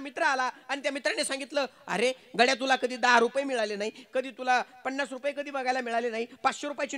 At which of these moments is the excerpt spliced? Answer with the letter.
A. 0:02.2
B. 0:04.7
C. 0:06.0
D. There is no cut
D